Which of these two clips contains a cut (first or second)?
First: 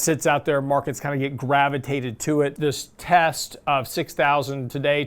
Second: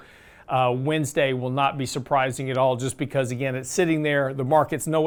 first